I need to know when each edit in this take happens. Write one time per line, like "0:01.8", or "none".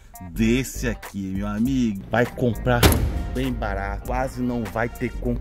0:02.0
0:04.0